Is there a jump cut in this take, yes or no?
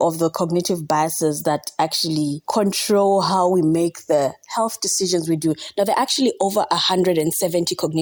no